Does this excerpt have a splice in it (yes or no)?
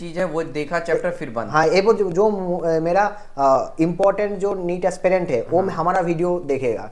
no